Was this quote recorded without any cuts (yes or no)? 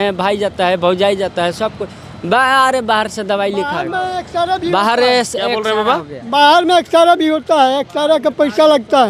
yes